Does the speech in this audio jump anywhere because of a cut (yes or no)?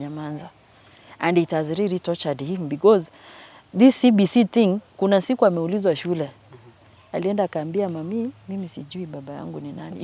no